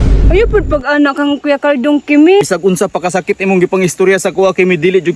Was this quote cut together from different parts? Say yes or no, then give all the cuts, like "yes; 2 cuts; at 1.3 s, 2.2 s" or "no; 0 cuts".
yes; 1 cut; at 2.4 s